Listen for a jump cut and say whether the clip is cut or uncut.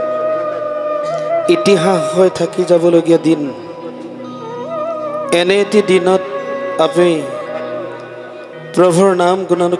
uncut